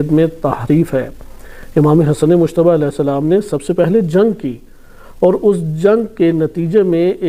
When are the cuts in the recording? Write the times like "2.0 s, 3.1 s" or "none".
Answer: none